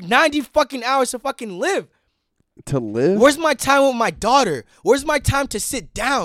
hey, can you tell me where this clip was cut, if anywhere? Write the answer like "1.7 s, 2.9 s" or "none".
none